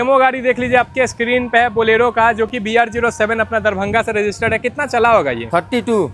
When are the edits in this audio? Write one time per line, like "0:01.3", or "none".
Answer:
none